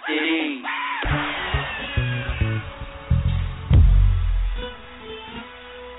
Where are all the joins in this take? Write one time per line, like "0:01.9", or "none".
0:01.1